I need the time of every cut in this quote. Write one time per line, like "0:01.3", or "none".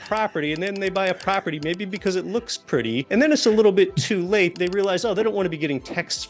0:03.0
0:04.6